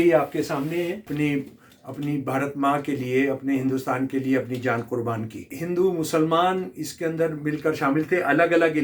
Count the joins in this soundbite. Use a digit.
2